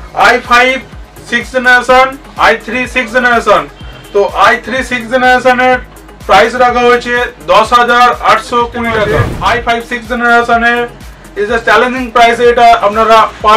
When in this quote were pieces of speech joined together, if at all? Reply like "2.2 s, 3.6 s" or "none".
9.2 s